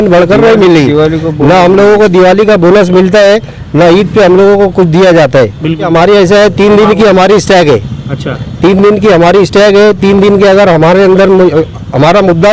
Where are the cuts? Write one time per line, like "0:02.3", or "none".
0:05.9